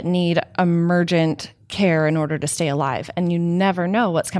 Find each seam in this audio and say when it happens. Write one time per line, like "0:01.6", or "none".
none